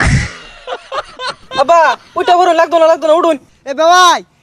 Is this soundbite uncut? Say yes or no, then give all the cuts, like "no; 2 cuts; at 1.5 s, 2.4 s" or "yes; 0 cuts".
no; 2 cuts; at 1.4 s, 3.5 s